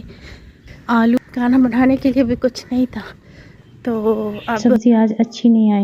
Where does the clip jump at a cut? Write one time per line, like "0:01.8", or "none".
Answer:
0:01.2
0:04.5